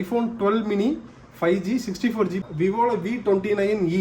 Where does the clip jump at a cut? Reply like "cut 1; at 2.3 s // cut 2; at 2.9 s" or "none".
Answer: cut 1; at 2.5 s